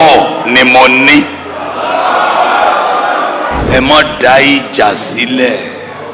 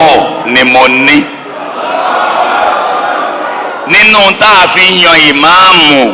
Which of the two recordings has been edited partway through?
first; 1 cut; at 3.6 s

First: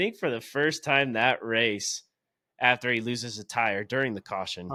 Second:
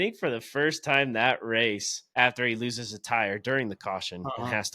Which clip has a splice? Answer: second; 1 cut; at 2.0 s

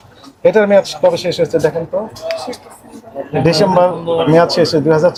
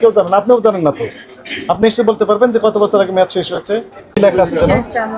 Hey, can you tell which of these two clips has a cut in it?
second; 1 cut; at 4.1 s

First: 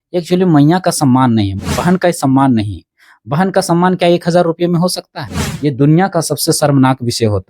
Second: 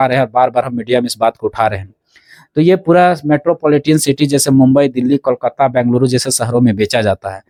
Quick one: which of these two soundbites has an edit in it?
first; 2 cuts; at 1.5 s, 5.3 s

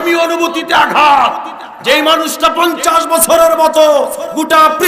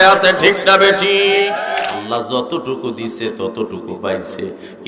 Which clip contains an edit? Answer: second; 1 cut; at 1.6 s

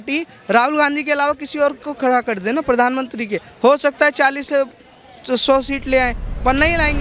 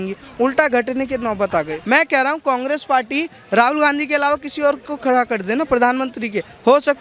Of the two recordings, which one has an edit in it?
second; 1 cut; at 1.8 s

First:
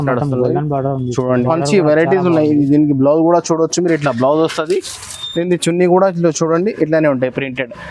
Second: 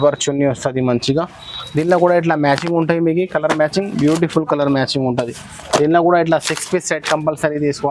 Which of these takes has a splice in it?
first; 1 cut; at 1.2 s

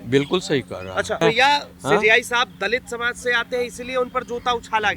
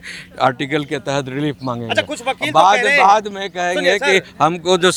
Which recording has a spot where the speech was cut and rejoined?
first; 1 cut; at 1.2 s

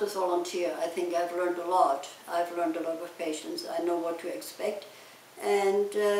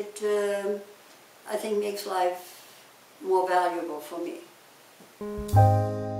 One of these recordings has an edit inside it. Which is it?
second; 1 cut; at 5.2 s

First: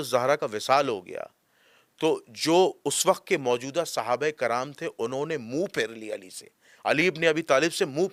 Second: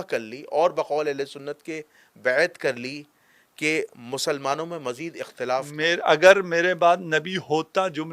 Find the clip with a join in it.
second; 1 cut; at 5.7 s

